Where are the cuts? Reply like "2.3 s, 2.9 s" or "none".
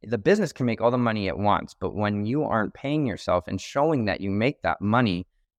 none